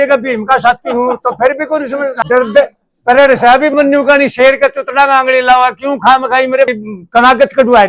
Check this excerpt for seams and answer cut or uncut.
cut